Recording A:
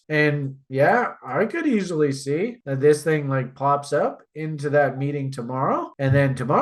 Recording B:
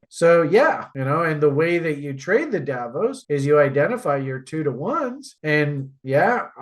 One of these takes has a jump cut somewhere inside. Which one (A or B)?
B